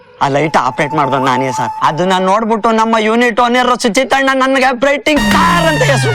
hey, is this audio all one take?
yes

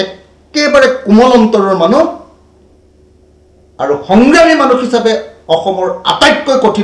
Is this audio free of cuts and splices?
yes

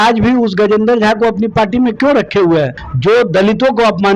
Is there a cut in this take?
yes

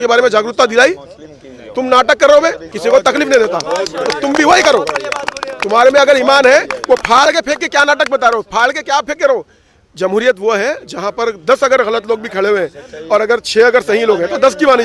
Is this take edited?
yes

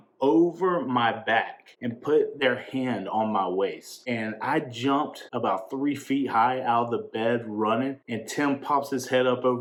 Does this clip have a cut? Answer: no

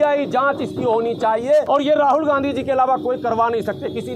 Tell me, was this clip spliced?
yes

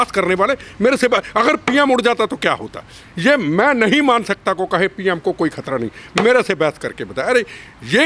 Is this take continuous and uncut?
yes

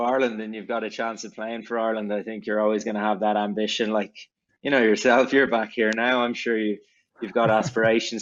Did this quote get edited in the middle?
no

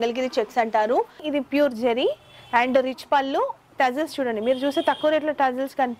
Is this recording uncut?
no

